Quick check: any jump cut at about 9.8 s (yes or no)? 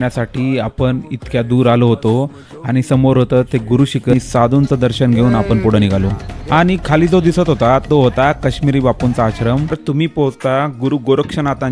yes